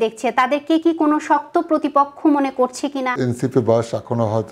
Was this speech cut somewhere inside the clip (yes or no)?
yes